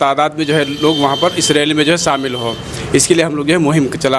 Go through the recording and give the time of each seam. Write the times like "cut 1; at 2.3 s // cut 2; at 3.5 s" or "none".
none